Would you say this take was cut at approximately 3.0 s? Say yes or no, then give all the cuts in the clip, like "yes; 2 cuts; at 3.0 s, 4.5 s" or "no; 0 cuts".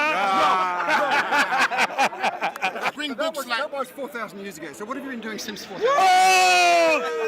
yes; 1 cut; at 3.0 s